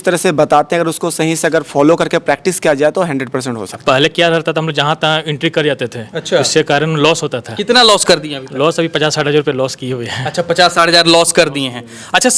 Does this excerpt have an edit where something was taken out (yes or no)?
yes